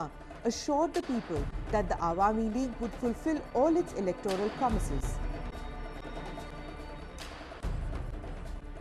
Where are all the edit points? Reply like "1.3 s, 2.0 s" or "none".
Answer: 1.9 s